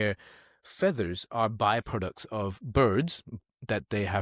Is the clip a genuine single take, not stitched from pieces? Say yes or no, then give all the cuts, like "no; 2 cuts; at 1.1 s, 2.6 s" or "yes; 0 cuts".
no; 1 cut; at 3.3 s